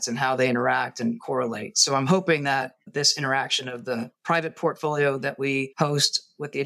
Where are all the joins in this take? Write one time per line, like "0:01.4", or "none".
0:05.7